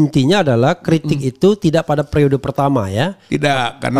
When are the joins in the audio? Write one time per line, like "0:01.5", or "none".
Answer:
none